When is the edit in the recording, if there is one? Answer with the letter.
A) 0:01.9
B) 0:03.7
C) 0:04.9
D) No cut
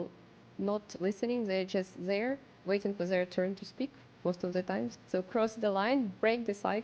C